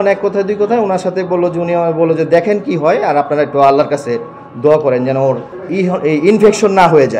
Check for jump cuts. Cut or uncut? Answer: uncut